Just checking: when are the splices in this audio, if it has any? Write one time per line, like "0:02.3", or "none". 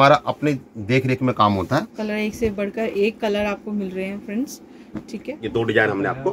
0:01.9
0:05.4